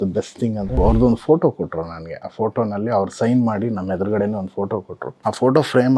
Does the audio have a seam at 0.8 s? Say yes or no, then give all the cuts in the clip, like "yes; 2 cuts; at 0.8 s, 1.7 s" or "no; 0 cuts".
yes; 2 cuts; at 0.8 s, 5.0 s